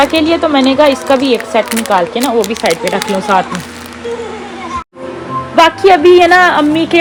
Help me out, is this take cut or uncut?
uncut